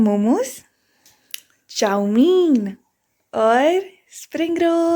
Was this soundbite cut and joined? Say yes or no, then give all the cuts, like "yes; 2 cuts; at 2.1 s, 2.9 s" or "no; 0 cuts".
no; 0 cuts